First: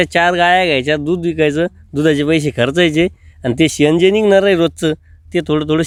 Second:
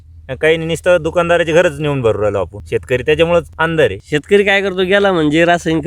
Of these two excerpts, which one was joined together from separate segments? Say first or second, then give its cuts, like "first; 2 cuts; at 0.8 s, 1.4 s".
second; 2 cuts; at 2.6 s, 3.6 s